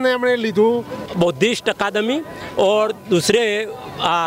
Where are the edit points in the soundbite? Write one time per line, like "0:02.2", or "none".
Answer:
0:01.0